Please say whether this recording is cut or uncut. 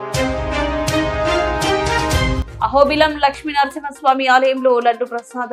cut